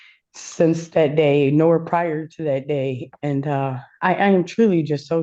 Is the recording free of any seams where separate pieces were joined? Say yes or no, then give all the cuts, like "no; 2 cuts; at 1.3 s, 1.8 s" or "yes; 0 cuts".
yes; 0 cuts